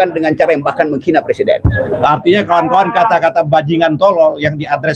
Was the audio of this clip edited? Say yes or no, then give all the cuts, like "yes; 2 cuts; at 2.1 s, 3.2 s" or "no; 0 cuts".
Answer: yes; 1 cut; at 1.8 s